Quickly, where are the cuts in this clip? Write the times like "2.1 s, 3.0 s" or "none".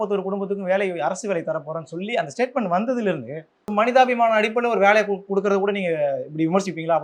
3.7 s